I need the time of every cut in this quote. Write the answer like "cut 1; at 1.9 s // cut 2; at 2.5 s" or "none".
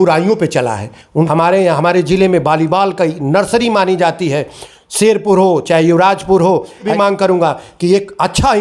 cut 1; at 1.3 s // cut 2; at 6.9 s